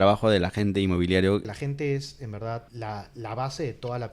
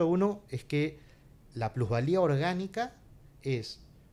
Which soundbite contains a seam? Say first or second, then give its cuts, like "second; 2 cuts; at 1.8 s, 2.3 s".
first; 2 cuts; at 1.5 s, 2.7 s